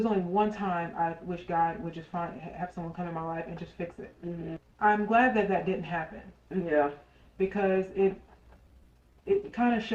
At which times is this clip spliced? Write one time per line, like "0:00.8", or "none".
0:04.6